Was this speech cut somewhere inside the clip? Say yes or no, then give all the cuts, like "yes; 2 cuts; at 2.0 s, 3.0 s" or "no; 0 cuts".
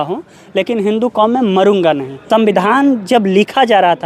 yes; 1 cut; at 2.1 s